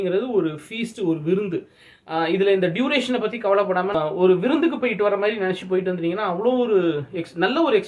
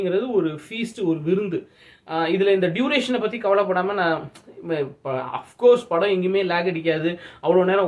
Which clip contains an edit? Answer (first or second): first